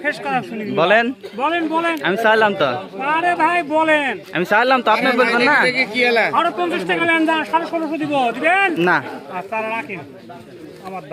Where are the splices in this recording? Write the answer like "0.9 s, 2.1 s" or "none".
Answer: none